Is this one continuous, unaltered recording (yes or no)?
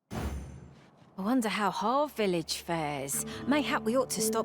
no